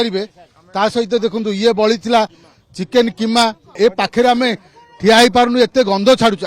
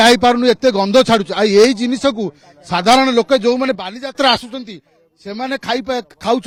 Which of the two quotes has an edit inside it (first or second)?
first